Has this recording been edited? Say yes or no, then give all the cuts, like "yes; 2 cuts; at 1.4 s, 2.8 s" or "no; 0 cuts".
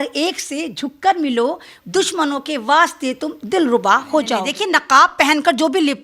yes; 2 cuts; at 1.7 s, 4.4 s